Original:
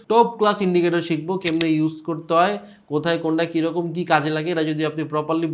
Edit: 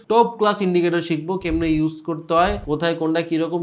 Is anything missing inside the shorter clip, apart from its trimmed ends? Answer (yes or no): yes